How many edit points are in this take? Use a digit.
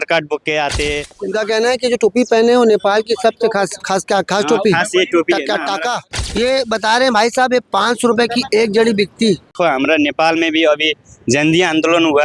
3